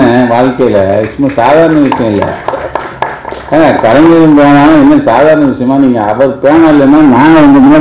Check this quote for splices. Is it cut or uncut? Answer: uncut